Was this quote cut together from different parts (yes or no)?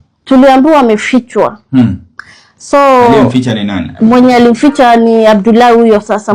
no